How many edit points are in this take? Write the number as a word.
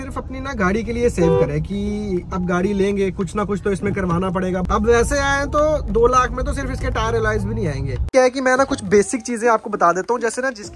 two